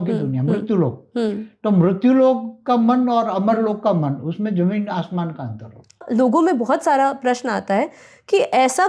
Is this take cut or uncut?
cut